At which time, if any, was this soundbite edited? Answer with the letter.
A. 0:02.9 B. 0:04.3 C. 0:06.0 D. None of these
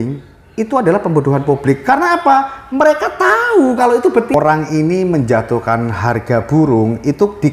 B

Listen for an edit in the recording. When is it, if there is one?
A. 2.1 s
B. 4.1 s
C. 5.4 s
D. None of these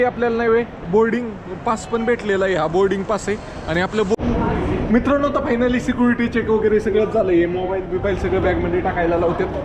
B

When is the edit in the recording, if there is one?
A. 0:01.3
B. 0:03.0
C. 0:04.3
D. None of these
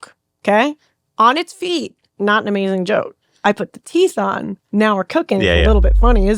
D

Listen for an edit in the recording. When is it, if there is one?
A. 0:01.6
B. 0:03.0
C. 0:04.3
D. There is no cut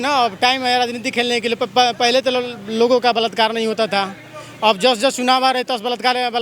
D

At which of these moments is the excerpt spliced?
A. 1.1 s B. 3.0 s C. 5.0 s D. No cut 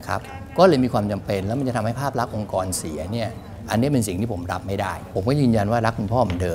C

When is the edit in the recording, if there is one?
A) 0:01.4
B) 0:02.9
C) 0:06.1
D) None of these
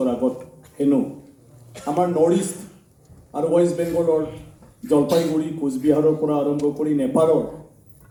D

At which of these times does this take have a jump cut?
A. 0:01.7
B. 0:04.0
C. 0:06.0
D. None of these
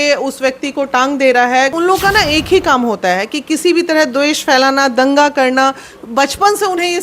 A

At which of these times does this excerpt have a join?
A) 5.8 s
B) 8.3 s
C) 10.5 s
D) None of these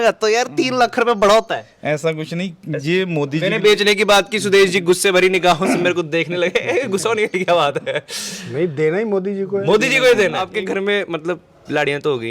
C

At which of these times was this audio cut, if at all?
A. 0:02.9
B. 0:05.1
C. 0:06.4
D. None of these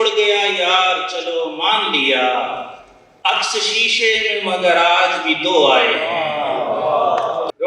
D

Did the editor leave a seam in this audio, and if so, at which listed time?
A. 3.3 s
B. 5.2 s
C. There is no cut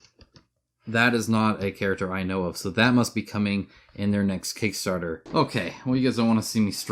B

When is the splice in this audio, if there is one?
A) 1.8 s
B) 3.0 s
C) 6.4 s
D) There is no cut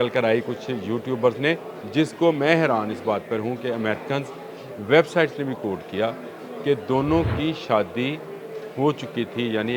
A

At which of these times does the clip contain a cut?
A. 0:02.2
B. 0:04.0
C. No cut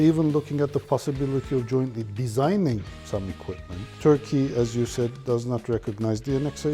B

